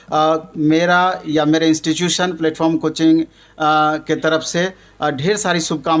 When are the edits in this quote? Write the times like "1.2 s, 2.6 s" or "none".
none